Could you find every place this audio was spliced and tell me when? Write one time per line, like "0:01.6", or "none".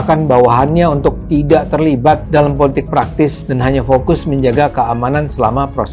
0:02.2
0:03.4